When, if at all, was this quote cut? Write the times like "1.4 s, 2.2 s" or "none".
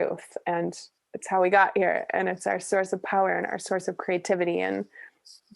none